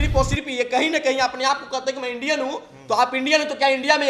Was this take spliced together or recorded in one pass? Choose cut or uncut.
uncut